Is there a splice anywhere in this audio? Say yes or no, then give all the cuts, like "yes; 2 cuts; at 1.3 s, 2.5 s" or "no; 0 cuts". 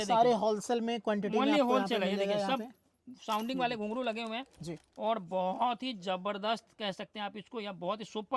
no; 0 cuts